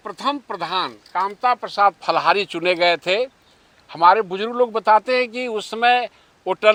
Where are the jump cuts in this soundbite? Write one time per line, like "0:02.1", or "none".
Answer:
none